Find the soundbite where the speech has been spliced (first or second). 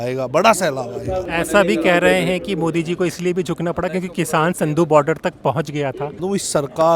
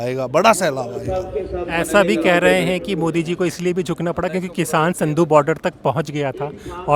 first